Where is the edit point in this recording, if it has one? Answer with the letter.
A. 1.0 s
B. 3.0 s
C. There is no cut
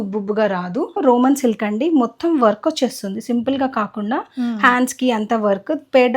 A